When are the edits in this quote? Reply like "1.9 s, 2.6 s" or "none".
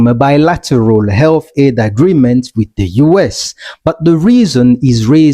none